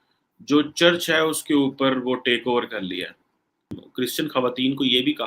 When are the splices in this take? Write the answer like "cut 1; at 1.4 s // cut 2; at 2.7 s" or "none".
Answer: cut 1; at 3.8 s